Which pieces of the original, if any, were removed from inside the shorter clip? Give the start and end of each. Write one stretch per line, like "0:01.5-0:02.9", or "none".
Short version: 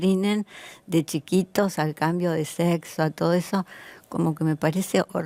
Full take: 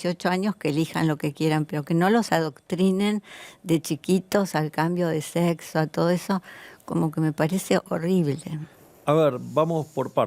none

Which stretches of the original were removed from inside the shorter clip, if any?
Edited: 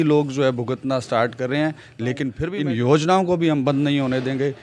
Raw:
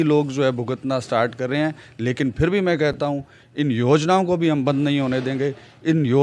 0:02.2-0:03.2

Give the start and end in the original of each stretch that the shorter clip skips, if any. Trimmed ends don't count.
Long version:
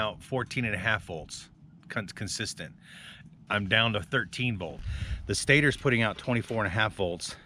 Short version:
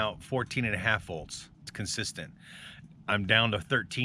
0:01.7-0:02.1

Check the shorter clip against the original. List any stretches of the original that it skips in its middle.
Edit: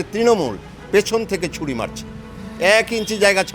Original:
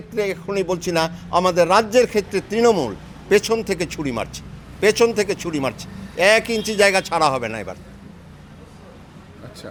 0:04.6-0:05.8

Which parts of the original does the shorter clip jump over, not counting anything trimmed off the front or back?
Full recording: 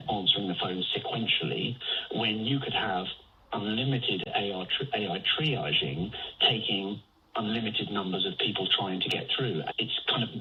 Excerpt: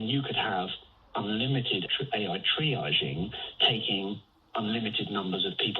0:04.3-0:04.7

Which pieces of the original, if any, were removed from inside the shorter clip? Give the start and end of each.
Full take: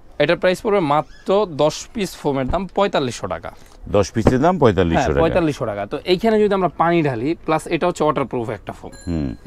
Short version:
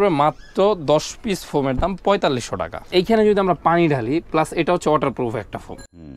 0:03.5-0:05.9

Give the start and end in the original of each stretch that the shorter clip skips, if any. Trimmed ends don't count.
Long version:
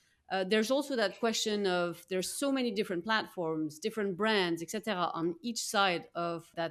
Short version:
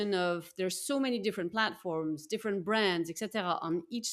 none

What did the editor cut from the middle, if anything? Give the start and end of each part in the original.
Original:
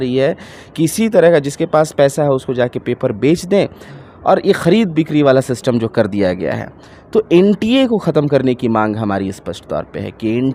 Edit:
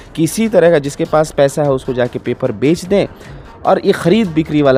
none

